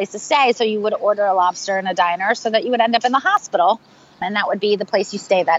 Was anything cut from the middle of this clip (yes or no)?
yes